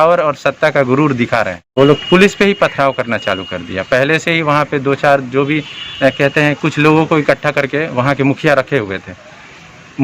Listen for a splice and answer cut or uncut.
cut